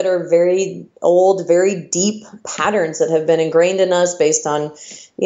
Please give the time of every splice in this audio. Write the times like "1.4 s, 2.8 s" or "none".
2.4 s